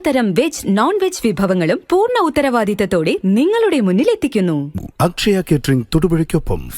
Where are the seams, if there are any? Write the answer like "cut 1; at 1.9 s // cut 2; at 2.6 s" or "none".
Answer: cut 1; at 4.7 s